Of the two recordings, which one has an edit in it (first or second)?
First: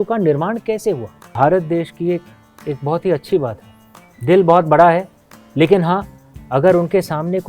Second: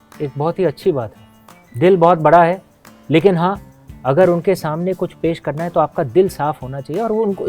first